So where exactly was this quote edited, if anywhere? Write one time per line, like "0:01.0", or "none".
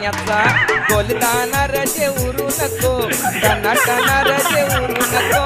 none